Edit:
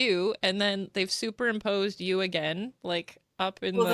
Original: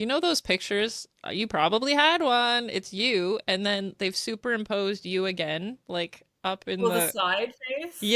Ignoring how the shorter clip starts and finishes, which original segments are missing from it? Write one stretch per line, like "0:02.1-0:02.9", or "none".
none

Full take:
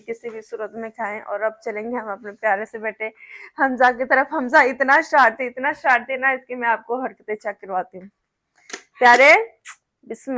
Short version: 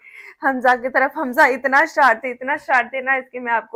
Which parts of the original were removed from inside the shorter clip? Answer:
none

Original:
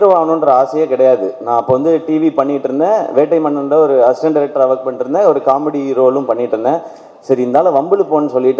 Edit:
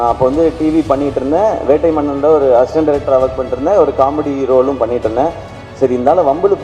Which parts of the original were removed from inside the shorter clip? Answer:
none

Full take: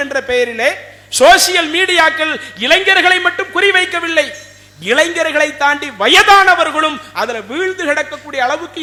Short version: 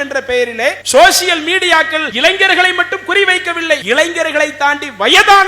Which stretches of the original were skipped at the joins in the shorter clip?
0:00.8-0:01.1
0:02.3-0:02.5
0:04.3-0:04.8

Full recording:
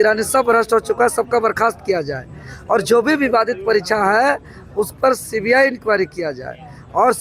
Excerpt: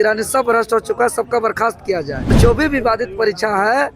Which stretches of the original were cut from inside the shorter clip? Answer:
0:02.4-0:02.8

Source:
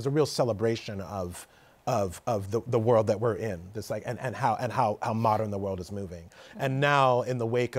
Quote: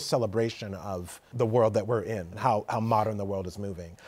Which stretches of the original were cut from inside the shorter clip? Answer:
0:01.6-0:02.7
0:03.7-0:04.7

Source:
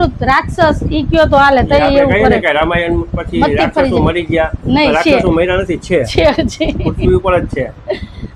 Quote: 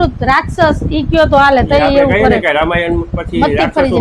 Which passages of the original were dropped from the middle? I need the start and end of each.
none

